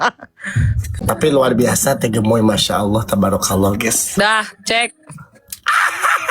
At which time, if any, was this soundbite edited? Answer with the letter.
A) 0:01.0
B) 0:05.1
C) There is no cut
A